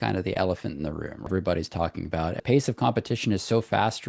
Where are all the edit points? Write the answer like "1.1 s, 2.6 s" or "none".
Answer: 1.3 s, 2.4 s